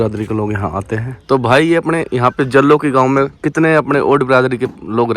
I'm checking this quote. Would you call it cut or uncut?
cut